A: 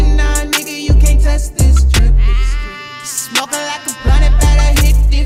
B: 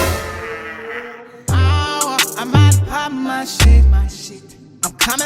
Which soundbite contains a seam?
B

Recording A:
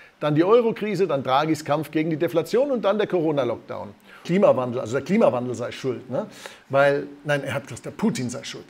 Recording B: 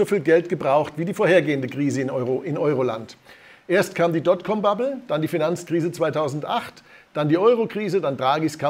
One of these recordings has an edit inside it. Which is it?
A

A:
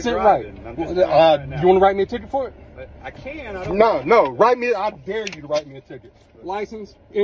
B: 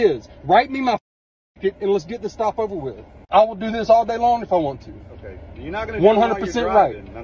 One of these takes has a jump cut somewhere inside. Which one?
B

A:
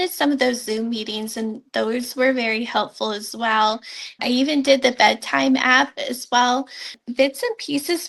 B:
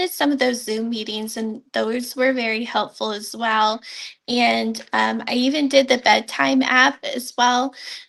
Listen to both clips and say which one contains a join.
A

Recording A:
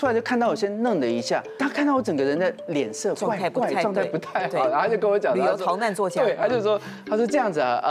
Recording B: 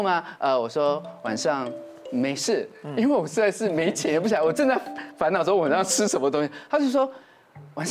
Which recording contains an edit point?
A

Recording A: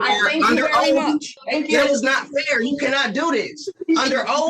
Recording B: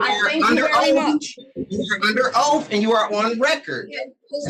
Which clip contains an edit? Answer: A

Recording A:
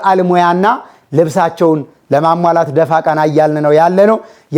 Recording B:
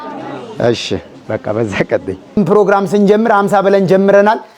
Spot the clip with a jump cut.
B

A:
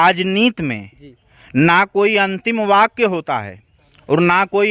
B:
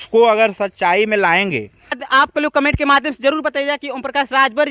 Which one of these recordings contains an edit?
B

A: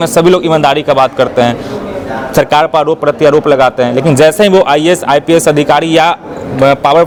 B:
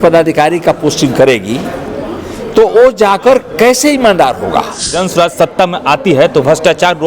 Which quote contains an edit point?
B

